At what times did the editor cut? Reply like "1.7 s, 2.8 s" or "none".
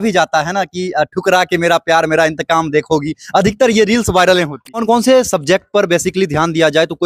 4.8 s